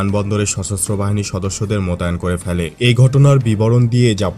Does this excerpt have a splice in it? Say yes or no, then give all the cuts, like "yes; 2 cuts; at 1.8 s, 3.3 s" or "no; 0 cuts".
yes; 1 cut; at 2.7 s